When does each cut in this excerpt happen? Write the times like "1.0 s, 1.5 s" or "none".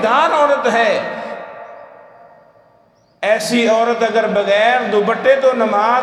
none